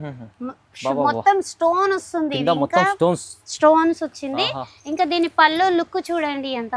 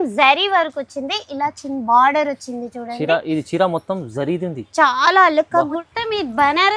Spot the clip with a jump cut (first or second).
second